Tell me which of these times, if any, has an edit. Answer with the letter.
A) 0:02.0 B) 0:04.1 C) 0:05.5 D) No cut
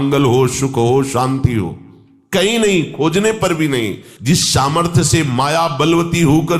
B